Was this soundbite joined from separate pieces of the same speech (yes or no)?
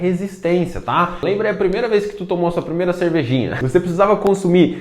yes